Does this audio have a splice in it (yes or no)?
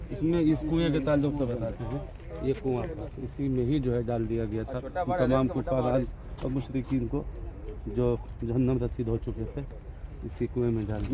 no